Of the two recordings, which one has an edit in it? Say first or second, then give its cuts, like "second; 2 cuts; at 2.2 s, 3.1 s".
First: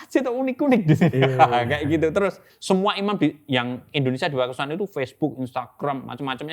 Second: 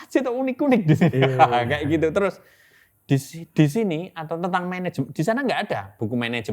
first; 1 cut; at 2.5 s